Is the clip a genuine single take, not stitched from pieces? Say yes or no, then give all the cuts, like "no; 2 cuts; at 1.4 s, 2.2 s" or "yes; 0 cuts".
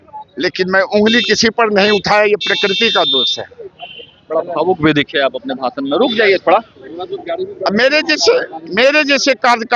yes; 0 cuts